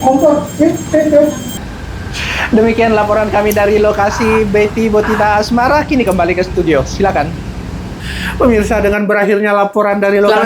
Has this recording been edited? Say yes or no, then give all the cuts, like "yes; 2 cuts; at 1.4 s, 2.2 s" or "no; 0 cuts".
no; 0 cuts